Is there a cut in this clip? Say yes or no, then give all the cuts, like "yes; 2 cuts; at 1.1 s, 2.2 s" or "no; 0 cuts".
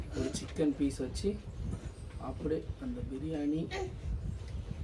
no; 0 cuts